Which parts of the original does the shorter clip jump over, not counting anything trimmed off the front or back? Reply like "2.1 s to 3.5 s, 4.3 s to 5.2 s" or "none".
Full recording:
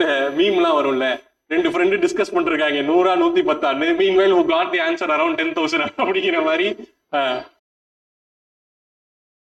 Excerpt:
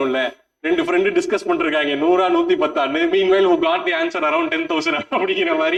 none